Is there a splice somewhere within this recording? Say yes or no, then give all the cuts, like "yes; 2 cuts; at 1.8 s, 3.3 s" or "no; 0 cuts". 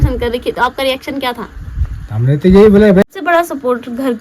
yes; 1 cut; at 3.1 s